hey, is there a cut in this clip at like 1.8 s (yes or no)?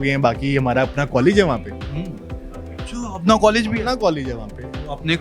no